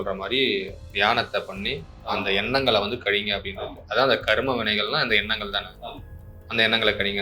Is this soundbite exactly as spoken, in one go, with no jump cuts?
yes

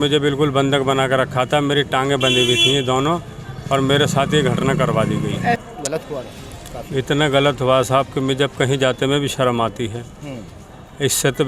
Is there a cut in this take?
yes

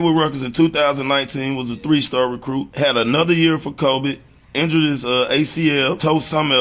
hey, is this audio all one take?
yes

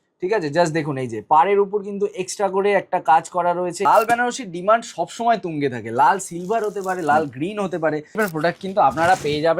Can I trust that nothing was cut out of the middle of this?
no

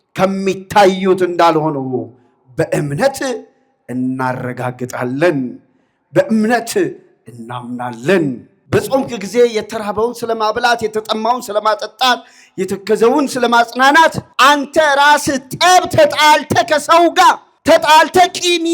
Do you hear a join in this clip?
yes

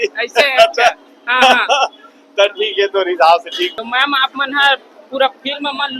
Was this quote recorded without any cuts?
no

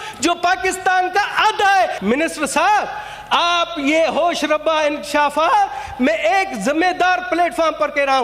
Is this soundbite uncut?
no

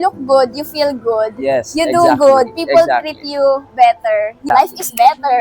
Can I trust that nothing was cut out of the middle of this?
no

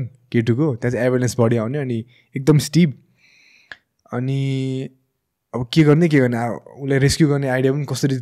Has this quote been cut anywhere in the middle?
no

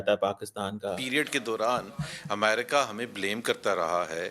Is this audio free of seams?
no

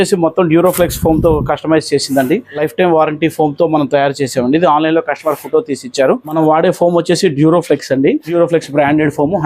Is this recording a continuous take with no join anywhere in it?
no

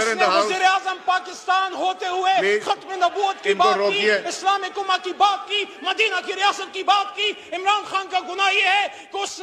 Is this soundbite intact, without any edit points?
yes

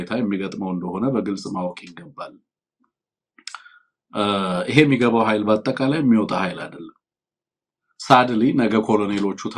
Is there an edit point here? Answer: no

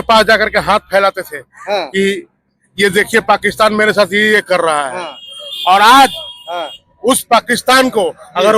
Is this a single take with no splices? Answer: yes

